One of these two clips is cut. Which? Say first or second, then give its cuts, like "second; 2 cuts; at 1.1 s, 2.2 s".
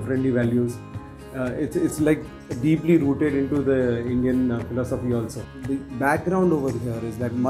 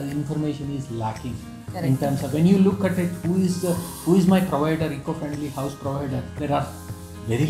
first; 1 cut; at 5.5 s